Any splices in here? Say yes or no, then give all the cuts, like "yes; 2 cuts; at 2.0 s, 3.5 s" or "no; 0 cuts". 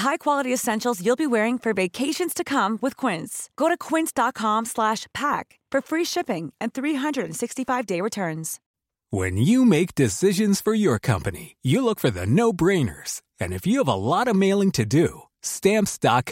no; 0 cuts